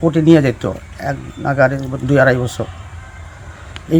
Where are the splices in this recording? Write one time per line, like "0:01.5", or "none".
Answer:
none

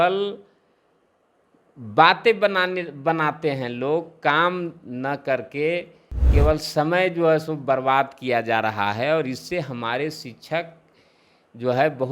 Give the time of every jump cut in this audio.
none

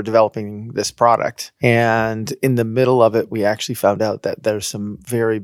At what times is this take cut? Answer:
0:01.4

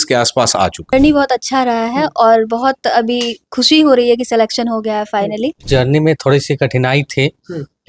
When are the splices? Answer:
0:00.9
0:05.6

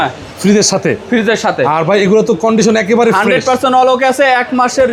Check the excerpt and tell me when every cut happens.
none

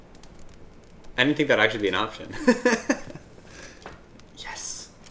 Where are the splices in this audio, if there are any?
0:01.1

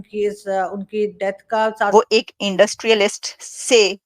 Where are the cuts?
0:01.9

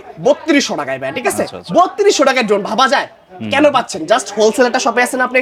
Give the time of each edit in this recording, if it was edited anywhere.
none

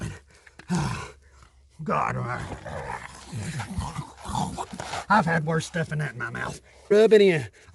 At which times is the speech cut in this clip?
0:06.7

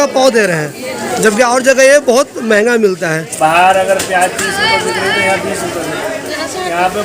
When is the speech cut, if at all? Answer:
0:03.2

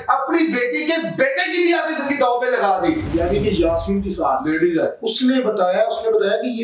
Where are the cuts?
0:03.0

